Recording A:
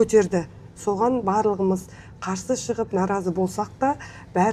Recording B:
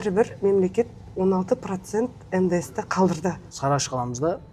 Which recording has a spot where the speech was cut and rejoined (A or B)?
B